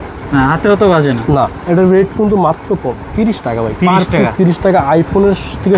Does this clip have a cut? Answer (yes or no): no